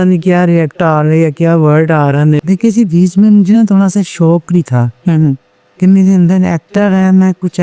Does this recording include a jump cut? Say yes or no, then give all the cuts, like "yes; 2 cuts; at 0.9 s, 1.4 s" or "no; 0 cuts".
yes; 1 cut; at 2.4 s